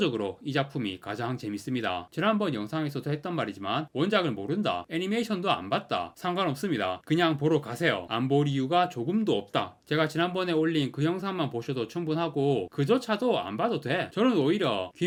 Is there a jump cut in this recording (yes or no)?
no